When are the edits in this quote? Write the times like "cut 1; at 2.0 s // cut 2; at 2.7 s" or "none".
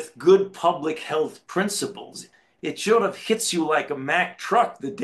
cut 1; at 2.3 s